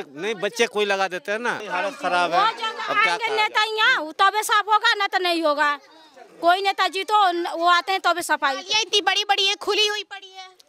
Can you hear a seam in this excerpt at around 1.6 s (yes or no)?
yes